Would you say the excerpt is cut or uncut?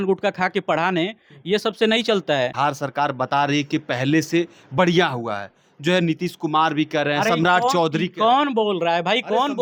uncut